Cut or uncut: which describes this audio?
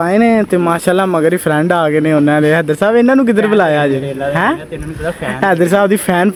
uncut